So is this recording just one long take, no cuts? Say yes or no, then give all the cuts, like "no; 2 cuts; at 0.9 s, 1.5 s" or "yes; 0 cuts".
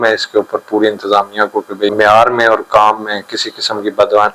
no; 1 cut; at 1.9 s